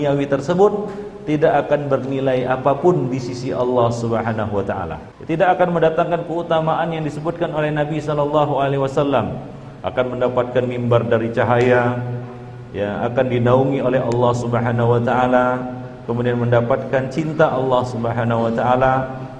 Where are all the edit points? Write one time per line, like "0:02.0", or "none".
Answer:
0:05.1